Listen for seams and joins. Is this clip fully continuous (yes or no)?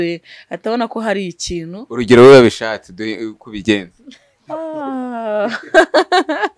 yes